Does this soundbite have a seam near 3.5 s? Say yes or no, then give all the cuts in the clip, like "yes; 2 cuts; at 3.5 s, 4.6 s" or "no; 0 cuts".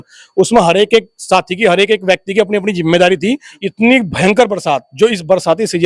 yes; 1 cut; at 3.5 s